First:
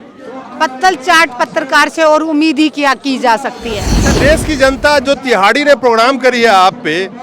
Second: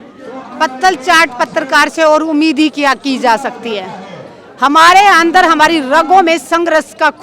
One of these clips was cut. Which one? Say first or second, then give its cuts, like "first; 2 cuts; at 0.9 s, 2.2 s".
first; 1 cut; at 4.0 s